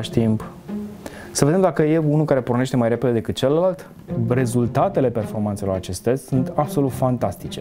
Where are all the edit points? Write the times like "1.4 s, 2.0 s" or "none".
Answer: 4.1 s